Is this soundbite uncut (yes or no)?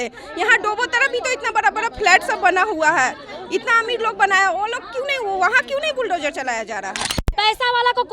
no